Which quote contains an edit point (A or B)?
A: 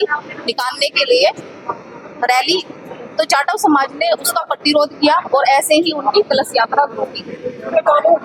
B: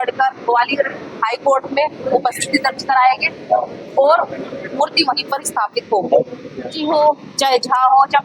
B